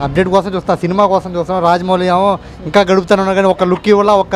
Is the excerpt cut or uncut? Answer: uncut